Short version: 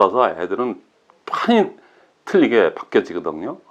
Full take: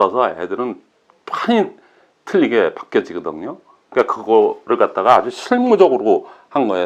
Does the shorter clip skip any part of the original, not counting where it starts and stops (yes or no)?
no